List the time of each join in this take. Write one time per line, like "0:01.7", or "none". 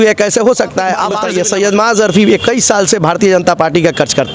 0:01.2